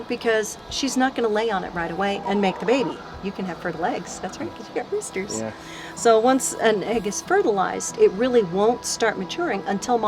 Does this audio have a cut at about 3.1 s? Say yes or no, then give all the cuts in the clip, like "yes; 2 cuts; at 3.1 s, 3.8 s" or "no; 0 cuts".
yes; 1 cut; at 3.1 s